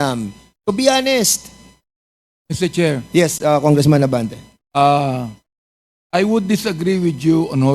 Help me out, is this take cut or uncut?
uncut